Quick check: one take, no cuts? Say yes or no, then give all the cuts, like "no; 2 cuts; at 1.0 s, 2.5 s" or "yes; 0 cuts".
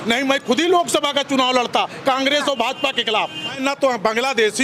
no; 1 cut; at 3.6 s